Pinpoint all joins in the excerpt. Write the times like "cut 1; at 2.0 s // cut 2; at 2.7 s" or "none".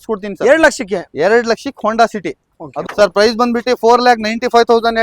cut 1; at 2.7 s